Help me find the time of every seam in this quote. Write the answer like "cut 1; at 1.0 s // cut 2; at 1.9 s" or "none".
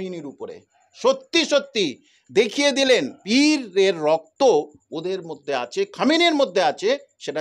cut 1; at 3.2 s

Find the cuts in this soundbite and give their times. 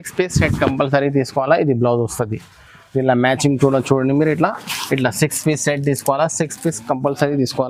none

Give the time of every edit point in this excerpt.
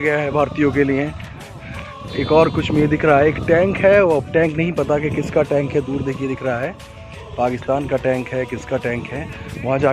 cut 1; at 1.3 s

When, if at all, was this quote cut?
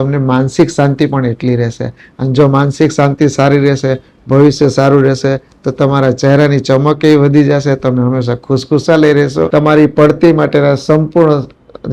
cut 1; at 9.5 s

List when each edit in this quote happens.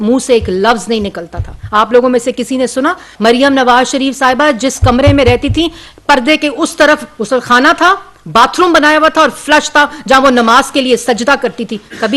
cut 1; at 3.1 s

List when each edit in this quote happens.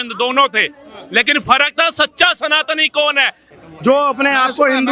cut 1; at 3.5 s

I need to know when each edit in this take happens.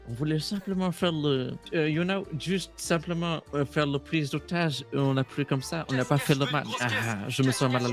cut 1; at 1.6 s // cut 2; at 6.7 s

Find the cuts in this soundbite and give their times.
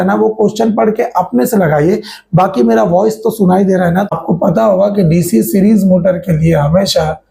cut 1; at 4.1 s

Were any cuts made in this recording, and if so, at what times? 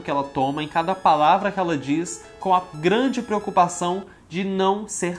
none

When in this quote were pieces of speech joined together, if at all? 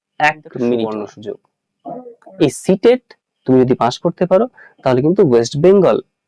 cut 1; at 1.1 s

